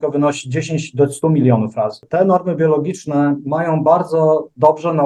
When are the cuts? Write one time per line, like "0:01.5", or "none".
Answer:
0:02.0